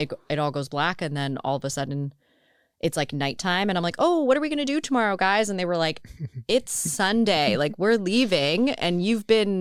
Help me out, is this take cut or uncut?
uncut